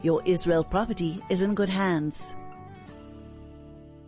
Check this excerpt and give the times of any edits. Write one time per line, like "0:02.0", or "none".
0:02.2